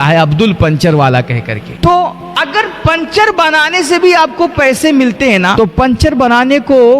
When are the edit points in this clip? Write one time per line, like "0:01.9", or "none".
0:01.7
0:02.2
0:05.5